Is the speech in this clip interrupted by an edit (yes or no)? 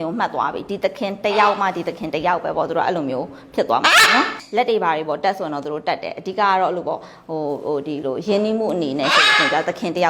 no